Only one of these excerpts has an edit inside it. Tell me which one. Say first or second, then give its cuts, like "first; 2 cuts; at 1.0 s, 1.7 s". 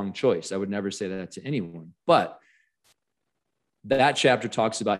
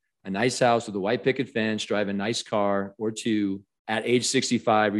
second; 1 cut; at 3.7 s